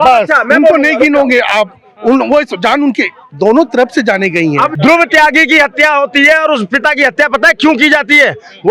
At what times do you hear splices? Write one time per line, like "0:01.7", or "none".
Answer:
0:04.7